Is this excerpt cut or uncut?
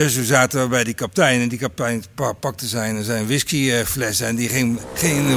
uncut